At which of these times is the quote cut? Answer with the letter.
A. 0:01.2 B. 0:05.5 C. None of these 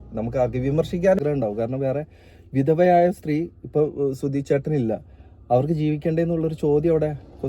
A